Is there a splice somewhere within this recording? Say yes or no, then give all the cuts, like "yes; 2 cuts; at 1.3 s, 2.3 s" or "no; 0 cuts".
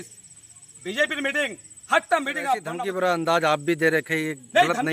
yes; 1 cut; at 2.8 s